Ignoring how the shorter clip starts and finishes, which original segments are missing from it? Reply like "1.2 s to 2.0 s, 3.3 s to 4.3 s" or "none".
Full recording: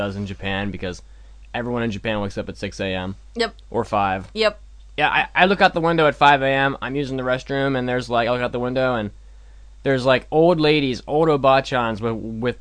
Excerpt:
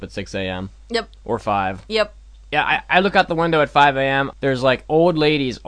6.8 s to 9.7 s